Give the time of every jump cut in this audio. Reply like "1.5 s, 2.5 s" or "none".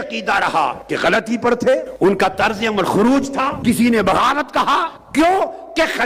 0.8 s, 1.9 s, 3.6 s, 5.0 s